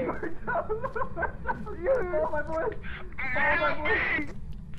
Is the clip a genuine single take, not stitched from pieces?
yes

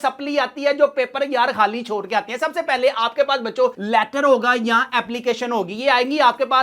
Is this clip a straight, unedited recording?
yes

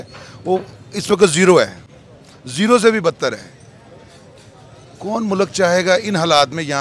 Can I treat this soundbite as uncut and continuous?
yes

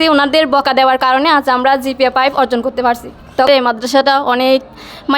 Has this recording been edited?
yes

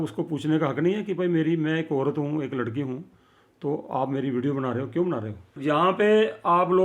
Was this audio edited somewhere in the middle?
yes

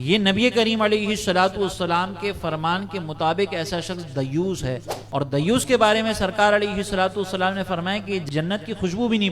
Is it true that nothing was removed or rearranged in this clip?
no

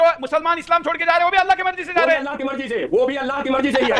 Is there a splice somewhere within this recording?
no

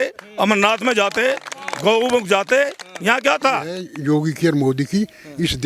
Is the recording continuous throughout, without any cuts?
no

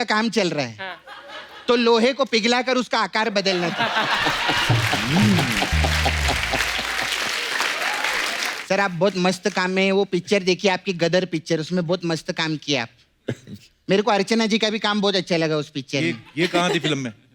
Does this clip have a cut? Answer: yes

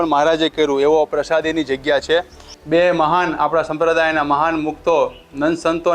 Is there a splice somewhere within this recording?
yes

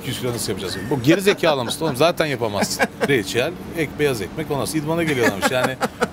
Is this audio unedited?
no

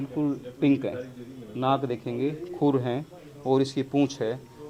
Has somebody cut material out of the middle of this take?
no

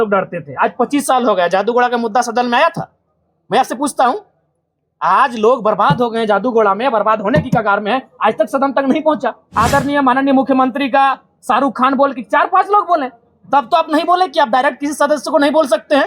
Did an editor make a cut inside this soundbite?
yes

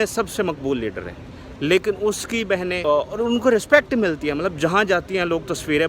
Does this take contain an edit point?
yes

